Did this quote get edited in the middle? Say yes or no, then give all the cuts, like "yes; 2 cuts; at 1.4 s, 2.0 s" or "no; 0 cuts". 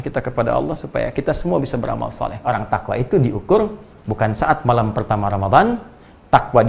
yes; 1 cut; at 2.4 s